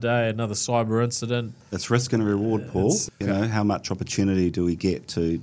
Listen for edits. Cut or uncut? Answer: cut